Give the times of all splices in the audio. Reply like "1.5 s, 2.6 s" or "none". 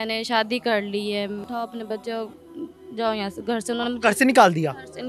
1.4 s